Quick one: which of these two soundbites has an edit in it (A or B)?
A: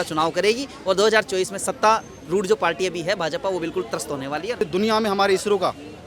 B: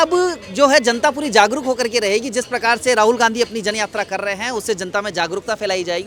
A